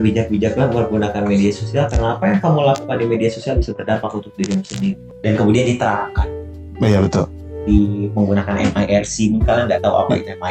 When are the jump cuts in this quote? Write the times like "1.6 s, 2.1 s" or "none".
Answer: 5.1 s